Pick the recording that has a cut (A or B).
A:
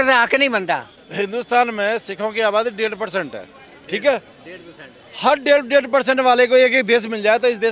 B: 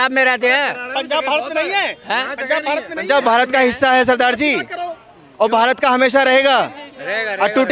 A